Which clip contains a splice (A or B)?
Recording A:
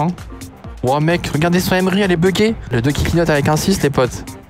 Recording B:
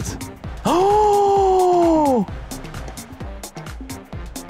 A